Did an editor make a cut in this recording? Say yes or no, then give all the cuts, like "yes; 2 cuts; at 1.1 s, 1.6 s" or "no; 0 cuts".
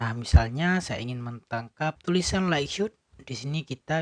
yes; 1 cut; at 2.0 s